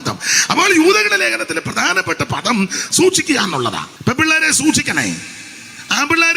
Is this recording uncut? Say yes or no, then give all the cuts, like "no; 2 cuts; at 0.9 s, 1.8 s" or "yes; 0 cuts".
no; 1 cut; at 3.9 s